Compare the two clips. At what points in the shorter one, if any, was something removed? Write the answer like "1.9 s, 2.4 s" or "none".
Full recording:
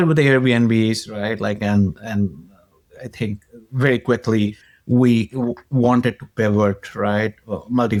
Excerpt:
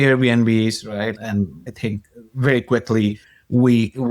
1.1 s